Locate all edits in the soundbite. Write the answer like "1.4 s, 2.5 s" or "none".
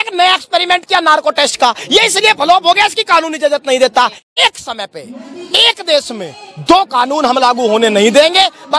4.2 s